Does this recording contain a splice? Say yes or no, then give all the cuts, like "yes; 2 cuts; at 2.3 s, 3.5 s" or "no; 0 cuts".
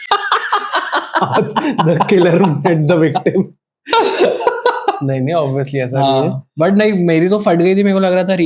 no; 0 cuts